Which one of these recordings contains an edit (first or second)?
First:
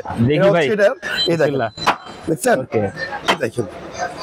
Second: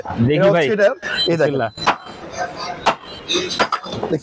second